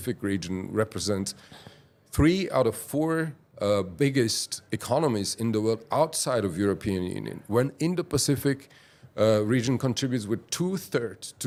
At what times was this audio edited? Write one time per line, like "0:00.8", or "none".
none